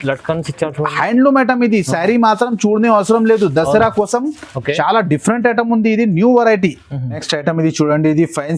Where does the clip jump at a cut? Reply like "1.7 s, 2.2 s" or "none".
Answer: 7.2 s